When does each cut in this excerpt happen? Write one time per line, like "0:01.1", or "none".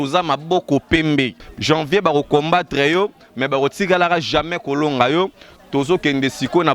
0:01.5